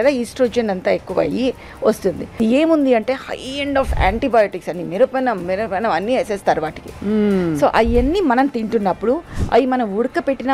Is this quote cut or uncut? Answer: cut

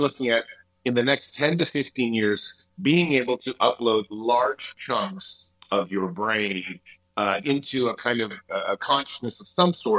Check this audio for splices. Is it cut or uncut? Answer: uncut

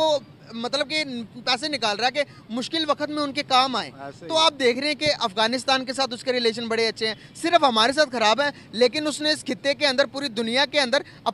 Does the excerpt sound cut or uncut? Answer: uncut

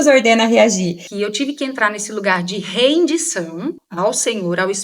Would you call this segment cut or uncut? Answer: cut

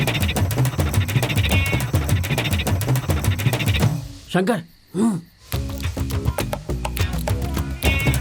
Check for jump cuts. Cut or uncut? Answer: uncut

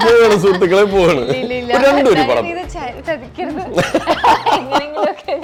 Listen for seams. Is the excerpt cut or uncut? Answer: uncut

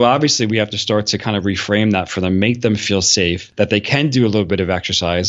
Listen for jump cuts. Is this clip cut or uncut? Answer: cut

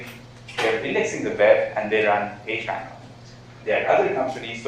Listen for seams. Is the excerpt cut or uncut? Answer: cut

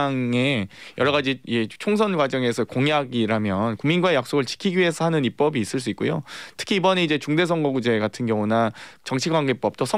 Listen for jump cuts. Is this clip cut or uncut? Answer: uncut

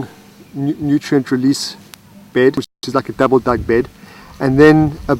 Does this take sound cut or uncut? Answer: cut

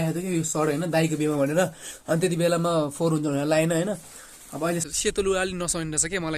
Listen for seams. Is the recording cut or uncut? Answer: cut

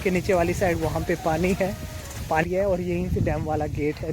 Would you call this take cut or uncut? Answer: cut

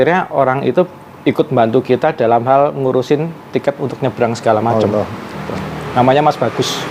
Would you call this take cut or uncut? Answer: uncut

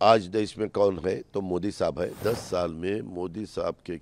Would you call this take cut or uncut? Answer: cut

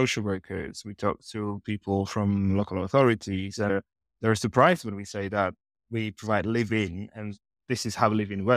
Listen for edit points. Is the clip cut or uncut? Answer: uncut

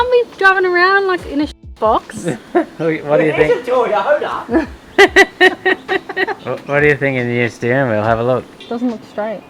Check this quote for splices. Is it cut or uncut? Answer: uncut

